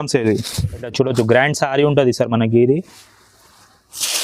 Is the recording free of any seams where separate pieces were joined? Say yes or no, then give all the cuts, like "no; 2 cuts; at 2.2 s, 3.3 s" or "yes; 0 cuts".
no; 1 cut; at 0.9 s